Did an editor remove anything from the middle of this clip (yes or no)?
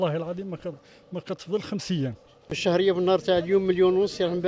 yes